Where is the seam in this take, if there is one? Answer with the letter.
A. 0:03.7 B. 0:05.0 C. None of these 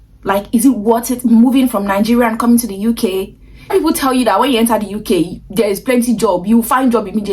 A